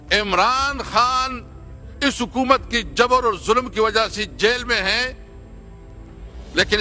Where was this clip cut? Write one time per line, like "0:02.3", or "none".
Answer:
none